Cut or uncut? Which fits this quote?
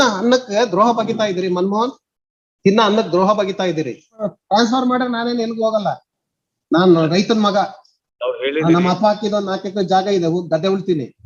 cut